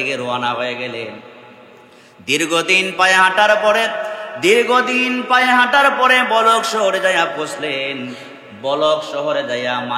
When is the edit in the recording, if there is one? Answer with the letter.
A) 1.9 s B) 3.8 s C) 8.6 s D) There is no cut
D